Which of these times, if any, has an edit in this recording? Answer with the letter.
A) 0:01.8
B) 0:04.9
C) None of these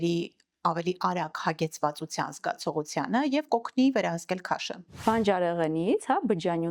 B